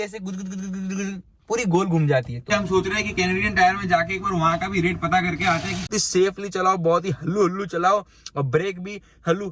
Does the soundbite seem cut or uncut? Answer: cut